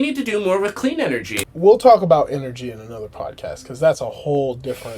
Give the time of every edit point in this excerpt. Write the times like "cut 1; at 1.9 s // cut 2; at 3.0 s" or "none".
cut 1; at 1.4 s